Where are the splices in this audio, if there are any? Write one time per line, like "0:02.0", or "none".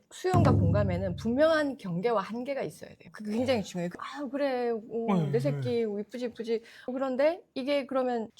0:03.9